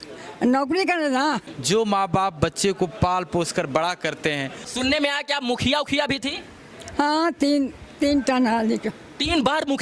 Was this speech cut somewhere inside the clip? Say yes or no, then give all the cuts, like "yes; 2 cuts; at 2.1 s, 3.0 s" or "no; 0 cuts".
yes; 2 cuts; at 1.5 s, 4.6 s